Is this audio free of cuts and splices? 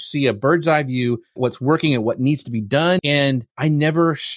no; 2 cuts; at 1.4 s, 3.0 s

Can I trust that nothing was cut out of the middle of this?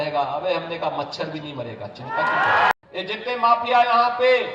no; 1 cut; at 2.7 s

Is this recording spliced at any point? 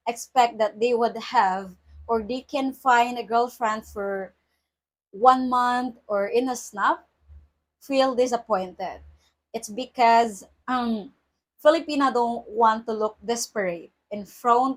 no; 0 cuts

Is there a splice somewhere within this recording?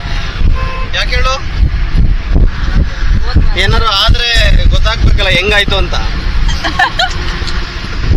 no; 0 cuts

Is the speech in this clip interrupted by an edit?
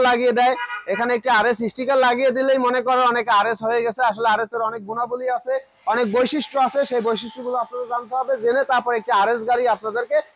no; 0 cuts

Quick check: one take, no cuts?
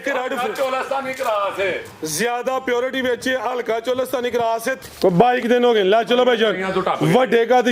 no; 1 cut; at 4.7 s

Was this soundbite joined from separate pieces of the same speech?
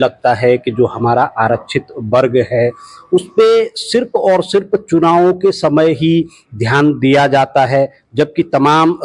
no; 0 cuts

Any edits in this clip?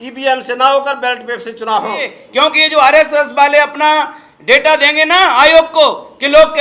yes; 1 cut; at 2.2 s

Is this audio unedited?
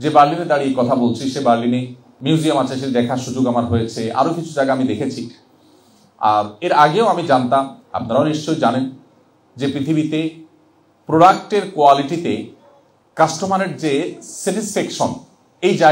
no; 1 cut; at 2.1 s

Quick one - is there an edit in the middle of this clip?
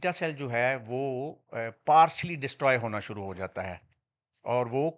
no; 0 cuts

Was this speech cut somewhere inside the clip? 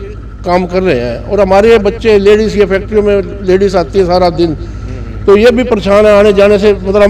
no; 0 cuts

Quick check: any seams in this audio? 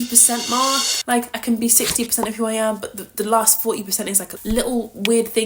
no; 0 cuts

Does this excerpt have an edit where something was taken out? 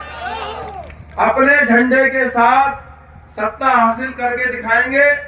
no; 0 cuts

